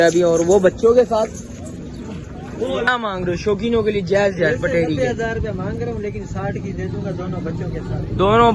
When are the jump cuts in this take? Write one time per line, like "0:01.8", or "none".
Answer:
0:02.9